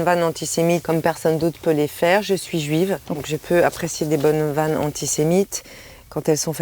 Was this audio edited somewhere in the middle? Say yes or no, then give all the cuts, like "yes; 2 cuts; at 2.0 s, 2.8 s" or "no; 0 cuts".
yes; 2 cuts; at 0.8 s, 3.3 s